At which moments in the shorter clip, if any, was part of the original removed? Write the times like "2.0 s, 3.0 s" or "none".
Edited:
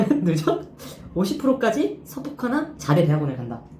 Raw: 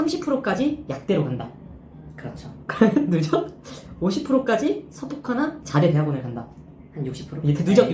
none